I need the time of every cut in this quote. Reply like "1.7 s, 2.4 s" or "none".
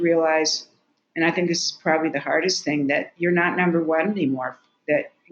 none